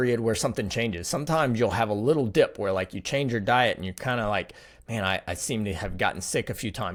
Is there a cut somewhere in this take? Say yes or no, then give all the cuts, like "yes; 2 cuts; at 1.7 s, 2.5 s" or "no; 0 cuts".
no; 0 cuts